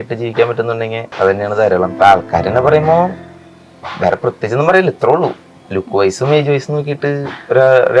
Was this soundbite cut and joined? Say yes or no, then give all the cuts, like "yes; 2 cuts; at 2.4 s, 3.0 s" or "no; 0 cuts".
yes; 2 cuts; at 1.0 s, 1.9 s